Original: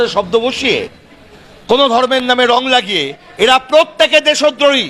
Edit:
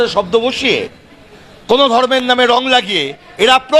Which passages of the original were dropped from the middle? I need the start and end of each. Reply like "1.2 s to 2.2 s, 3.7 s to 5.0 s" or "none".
none